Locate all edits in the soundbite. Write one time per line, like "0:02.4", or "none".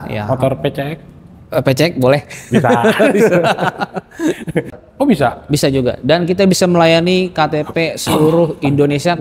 0:04.8